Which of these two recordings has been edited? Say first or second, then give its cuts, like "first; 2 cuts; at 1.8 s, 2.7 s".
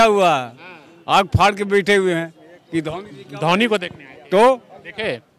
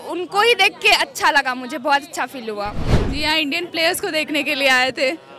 second; 1 cut; at 2.9 s